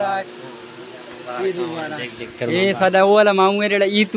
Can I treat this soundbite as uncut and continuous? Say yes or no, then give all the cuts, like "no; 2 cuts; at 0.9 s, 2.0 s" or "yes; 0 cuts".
yes; 0 cuts